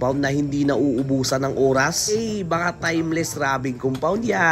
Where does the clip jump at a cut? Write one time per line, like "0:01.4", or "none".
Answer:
none